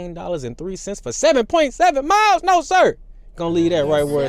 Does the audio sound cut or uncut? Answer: uncut